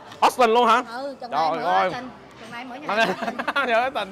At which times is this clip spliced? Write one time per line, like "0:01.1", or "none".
none

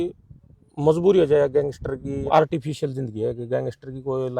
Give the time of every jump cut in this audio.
0:02.3

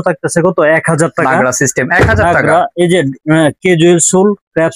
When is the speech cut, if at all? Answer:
none

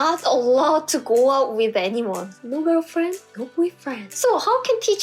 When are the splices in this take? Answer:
0:02.3
0:04.0

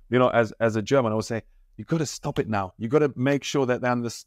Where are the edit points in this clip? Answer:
none

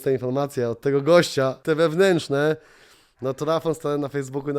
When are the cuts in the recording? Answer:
0:01.6

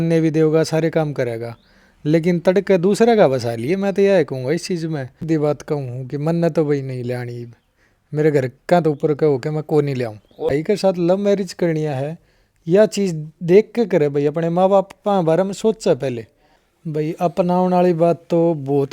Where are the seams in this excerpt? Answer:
0:05.2
0:10.5
0:17.0

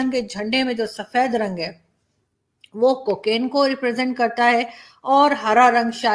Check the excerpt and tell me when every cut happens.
none

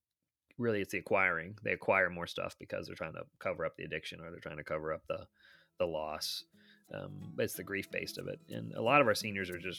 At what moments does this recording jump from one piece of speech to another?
none

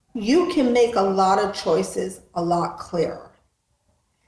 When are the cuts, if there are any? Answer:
none

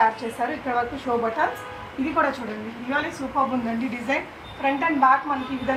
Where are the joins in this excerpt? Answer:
none

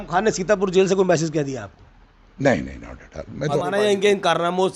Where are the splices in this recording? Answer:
0:03.6

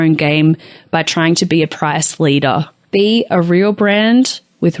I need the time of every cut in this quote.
0:02.8

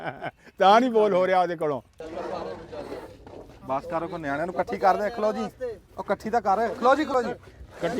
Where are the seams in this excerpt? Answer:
0:02.0

